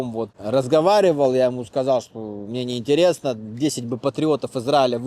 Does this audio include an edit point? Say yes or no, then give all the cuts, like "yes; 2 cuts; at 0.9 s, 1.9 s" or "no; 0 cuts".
no; 0 cuts